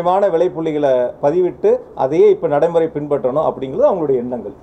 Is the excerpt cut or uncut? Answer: uncut